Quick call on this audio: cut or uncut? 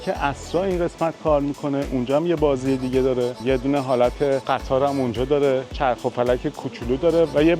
uncut